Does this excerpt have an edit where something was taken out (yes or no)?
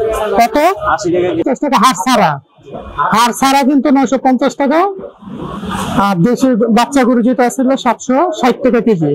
yes